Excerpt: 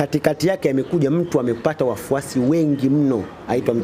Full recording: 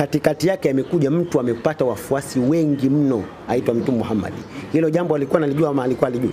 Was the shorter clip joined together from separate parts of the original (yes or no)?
no